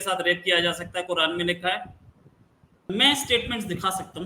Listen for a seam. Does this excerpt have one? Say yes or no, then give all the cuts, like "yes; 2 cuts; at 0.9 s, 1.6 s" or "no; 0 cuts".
yes; 1 cut; at 2.9 s